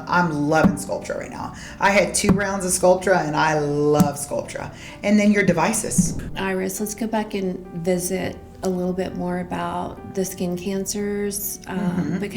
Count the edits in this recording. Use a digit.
1